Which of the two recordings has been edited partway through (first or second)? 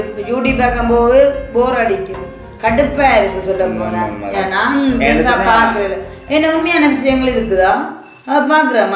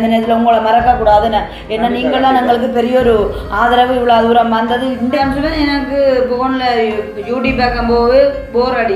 second